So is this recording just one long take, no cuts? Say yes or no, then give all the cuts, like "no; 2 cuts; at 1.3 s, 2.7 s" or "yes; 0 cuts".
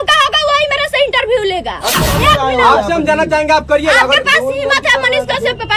no; 1 cut; at 2.0 s